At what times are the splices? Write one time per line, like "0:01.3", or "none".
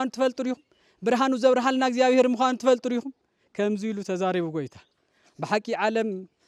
none